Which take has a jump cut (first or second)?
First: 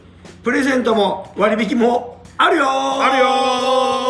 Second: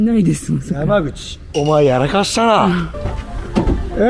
second